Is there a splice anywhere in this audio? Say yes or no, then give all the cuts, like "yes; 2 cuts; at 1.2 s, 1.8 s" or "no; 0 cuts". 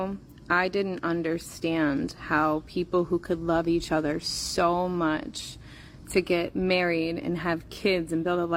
no; 0 cuts